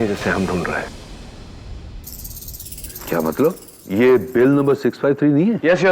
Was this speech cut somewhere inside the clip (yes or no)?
no